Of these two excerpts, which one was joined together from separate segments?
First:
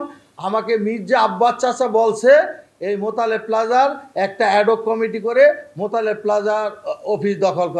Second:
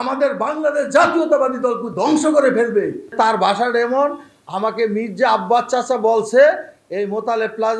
second; 1 cut; at 3.1 s

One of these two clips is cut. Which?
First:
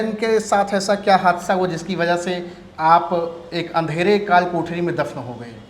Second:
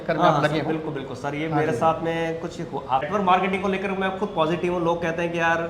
second; 1 cut; at 3.0 s

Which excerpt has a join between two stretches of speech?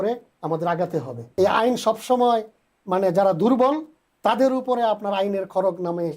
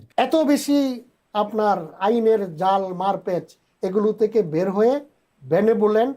first; 1 cut; at 1.3 s

